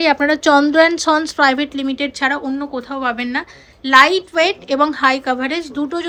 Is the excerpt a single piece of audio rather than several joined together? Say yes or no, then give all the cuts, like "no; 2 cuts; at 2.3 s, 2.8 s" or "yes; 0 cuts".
yes; 0 cuts